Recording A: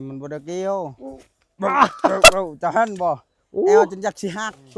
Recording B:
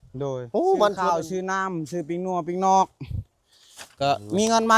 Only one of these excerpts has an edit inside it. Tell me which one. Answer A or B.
B